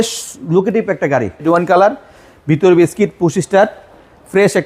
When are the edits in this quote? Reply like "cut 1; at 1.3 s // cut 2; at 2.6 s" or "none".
cut 1; at 1.4 s